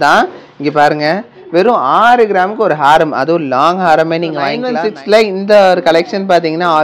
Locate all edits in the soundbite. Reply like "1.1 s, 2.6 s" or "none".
none

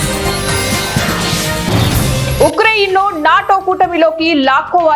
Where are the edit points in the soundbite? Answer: 2.1 s

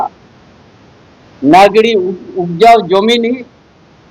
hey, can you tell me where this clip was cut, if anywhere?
none

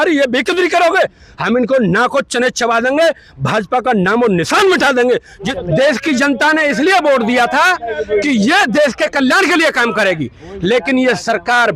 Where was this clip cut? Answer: 5.4 s

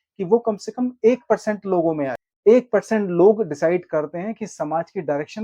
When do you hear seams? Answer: 2.2 s

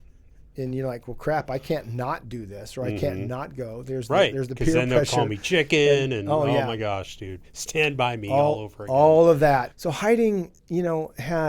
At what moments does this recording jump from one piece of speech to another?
9.7 s

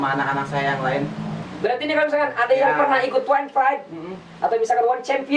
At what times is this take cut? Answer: 1.5 s

